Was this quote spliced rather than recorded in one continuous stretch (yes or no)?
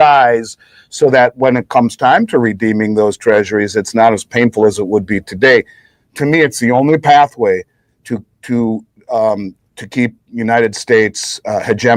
no